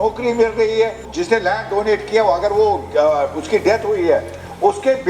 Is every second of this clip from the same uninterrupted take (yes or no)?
no